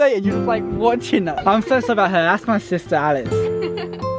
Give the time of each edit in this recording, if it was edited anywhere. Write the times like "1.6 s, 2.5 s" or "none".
3.3 s